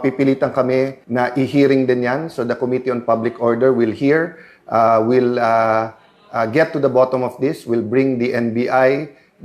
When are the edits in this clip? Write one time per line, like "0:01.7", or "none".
0:01.0